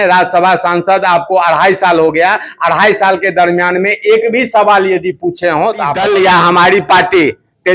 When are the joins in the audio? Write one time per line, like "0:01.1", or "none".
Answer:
0:06.0